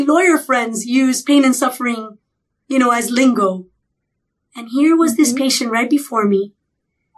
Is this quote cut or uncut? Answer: uncut